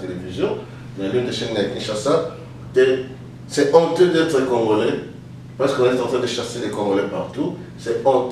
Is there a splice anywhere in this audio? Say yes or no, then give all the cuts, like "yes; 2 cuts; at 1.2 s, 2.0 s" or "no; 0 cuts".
no; 0 cuts